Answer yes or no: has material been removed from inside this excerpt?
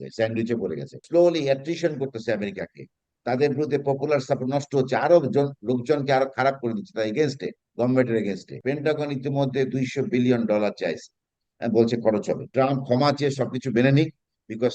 yes